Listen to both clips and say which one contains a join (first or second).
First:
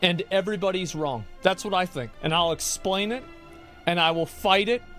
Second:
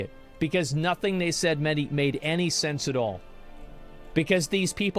first